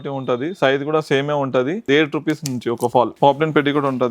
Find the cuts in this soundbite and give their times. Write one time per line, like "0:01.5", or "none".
0:01.8
0:03.1